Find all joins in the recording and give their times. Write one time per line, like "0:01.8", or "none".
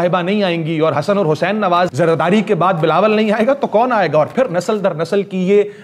0:01.9